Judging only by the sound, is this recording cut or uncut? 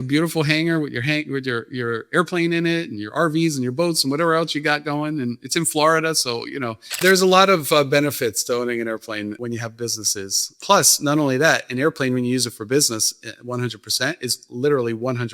cut